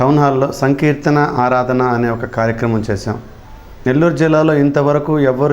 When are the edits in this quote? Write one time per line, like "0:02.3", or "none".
0:03.7